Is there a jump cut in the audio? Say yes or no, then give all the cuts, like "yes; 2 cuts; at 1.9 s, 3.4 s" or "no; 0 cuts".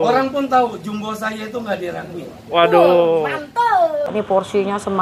yes; 1 cut; at 4.1 s